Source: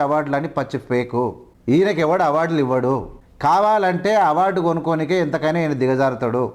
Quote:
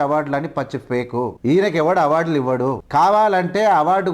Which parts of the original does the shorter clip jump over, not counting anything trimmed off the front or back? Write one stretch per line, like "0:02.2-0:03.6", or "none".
0:01.3-0:01.6
0:03.0-0:03.3